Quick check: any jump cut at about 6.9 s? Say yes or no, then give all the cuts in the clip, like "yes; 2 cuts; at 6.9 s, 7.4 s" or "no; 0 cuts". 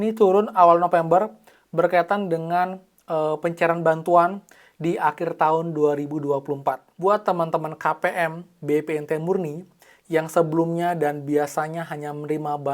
yes; 1 cut; at 6.9 s